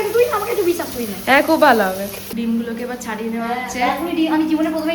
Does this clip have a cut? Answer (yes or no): yes